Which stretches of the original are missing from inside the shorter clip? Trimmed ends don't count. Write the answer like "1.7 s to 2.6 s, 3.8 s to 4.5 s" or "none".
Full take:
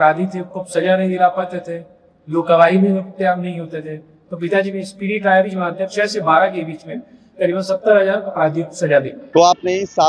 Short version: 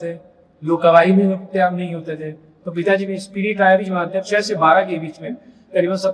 none